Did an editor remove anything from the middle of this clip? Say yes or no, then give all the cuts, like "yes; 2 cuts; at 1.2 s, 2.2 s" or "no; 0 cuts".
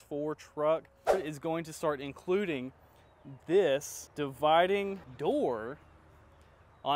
yes; 3 cuts; at 1.1 s, 4.0 s, 5.1 s